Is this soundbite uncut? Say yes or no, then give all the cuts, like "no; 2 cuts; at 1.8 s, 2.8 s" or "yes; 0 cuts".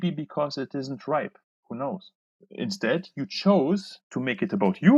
no; 2 cuts; at 2.4 s, 4.1 s